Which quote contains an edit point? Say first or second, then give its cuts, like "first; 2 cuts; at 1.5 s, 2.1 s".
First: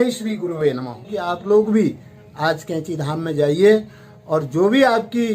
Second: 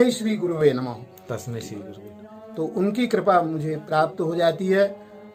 first; 1 cut; at 1.1 s